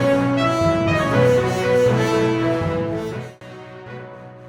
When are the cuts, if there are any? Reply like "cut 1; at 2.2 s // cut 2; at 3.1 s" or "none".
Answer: cut 1; at 3.2 s